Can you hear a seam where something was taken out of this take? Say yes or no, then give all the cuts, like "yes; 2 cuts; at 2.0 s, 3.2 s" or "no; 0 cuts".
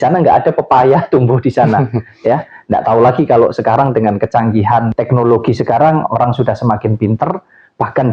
yes; 1 cut; at 5.0 s